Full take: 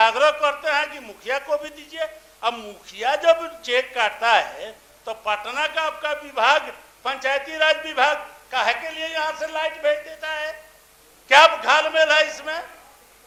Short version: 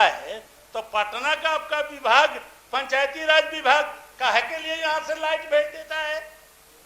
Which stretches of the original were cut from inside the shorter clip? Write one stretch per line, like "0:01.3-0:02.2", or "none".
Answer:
none